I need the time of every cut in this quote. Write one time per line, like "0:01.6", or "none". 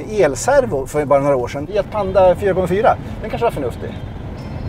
0:01.7

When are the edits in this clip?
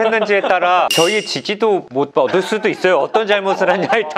0:02.0

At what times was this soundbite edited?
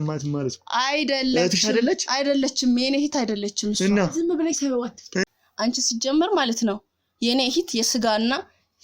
0:05.2

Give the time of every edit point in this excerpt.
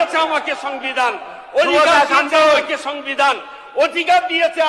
none

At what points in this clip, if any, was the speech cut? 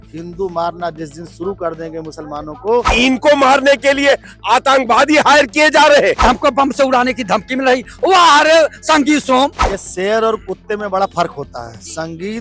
0:02.9
0:06.2
0:09.7

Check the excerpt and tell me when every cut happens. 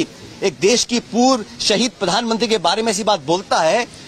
none

